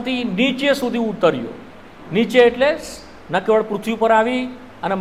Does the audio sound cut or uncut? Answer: uncut